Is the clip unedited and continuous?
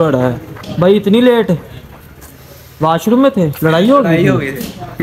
yes; 0 cuts

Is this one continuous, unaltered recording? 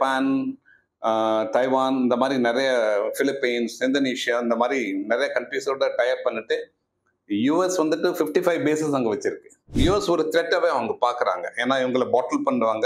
no; 1 cut; at 9.8 s

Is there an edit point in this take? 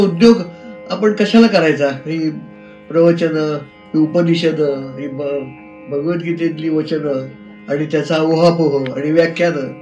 no; 0 cuts

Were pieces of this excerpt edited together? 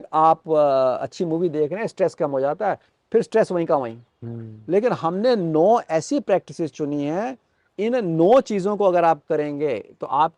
yes; 1 cut; at 7.7 s

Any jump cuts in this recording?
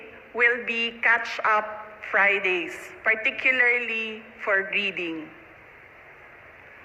no; 0 cuts

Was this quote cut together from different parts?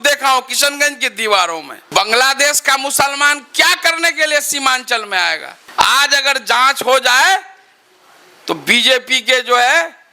yes; 2 cuts; at 1.9 s, 5.5 s

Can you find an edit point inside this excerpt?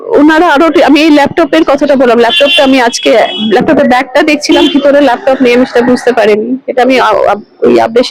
no; 0 cuts

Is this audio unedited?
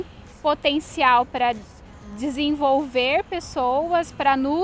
yes; 0 cuts

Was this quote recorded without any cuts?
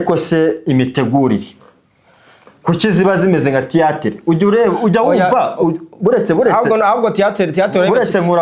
yes; 0 cuts

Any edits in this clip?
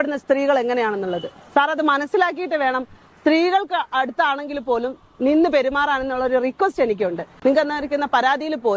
no; 0 cuts

